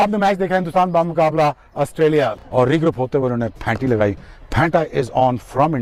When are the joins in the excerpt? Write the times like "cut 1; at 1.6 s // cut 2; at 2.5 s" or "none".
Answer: none